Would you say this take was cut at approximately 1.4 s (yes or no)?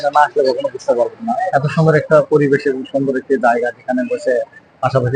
yes